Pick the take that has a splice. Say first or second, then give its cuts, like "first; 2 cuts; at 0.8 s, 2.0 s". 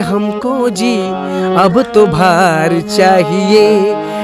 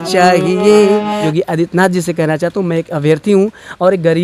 second; 1 cut; at 1.2 s